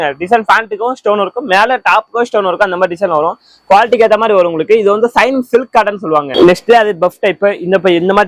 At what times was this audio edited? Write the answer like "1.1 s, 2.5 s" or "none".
6.3 s